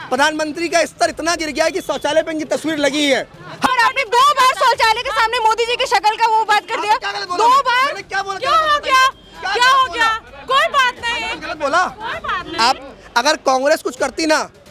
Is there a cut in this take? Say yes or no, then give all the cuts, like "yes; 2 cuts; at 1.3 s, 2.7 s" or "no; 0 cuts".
yes; 2 cuts; at 3.7 s, 12.8 s